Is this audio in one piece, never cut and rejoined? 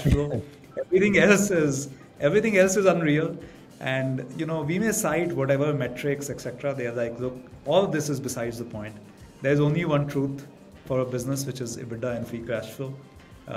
yes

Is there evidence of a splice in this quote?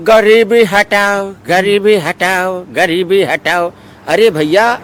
no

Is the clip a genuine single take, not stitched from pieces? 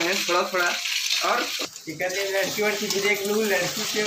no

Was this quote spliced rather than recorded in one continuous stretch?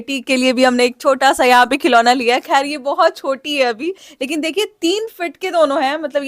yes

